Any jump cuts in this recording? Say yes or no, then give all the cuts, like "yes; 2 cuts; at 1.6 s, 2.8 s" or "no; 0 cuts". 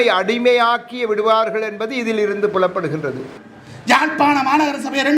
yes; 1 cut; at 3.3 s